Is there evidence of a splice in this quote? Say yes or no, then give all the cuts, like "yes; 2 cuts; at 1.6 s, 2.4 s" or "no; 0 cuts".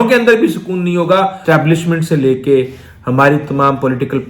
yes; 1 cut; at 1.4 s